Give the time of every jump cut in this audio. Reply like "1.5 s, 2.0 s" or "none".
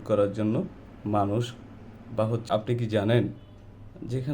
2.4 s